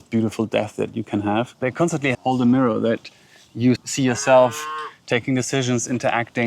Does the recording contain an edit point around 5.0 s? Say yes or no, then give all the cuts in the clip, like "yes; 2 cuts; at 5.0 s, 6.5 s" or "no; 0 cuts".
no; 1 cut; at 2.0 s